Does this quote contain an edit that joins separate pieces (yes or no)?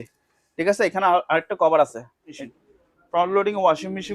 yes